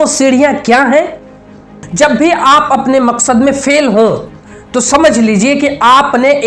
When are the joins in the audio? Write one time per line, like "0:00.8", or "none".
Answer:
0:01.8